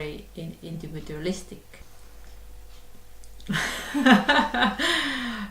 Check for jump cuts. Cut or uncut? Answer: cut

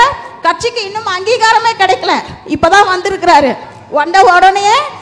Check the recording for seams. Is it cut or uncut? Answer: uncut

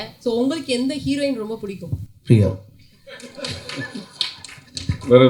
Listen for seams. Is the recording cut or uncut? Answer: cut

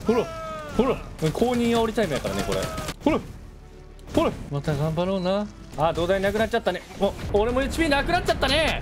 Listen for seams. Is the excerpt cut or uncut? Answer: cut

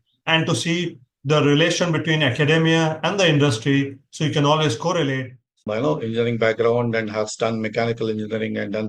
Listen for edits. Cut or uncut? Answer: cut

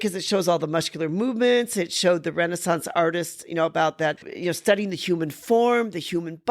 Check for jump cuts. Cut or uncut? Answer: cut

